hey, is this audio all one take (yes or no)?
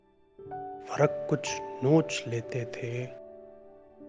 no